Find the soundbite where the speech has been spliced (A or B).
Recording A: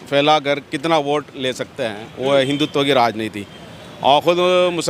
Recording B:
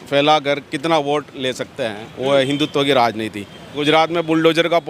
B